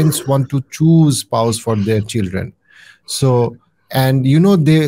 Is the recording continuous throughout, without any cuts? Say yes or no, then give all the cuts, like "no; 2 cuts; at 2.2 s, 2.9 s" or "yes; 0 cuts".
yes; 0 cuts